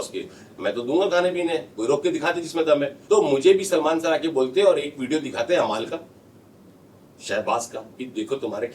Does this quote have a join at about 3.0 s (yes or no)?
yes